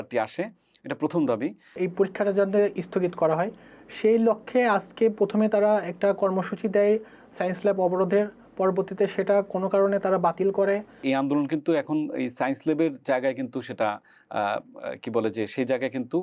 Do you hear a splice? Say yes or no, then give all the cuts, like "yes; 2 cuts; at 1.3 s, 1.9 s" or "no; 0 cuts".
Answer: yes; 2 cuts; at 1.8 s, 11.0 s